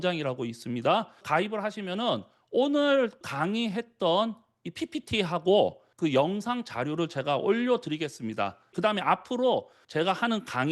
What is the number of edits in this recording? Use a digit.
3